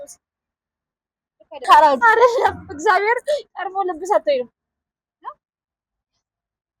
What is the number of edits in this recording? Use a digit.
1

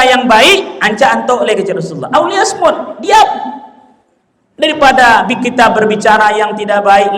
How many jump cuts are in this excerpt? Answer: 0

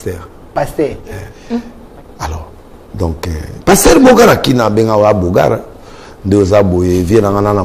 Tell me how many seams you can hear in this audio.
1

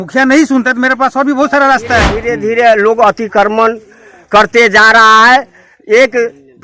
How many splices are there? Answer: 1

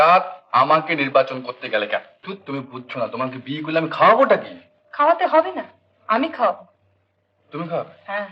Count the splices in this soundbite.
1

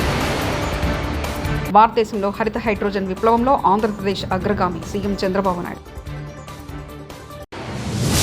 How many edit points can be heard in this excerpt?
1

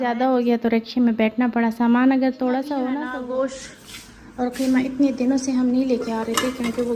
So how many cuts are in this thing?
1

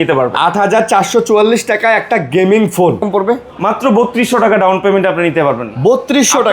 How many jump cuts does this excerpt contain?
1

